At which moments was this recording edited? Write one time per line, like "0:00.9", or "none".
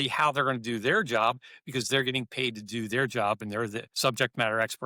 0:03.8